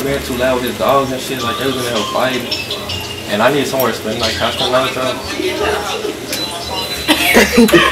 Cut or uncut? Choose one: uncut